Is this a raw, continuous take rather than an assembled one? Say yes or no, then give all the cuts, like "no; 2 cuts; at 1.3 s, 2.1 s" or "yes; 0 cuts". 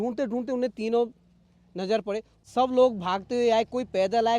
no; 1 cut; at 2.3 s